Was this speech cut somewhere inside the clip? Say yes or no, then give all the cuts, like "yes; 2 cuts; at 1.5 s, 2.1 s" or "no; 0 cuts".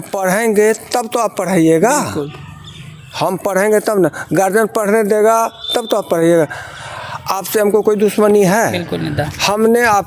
no; 0 cuts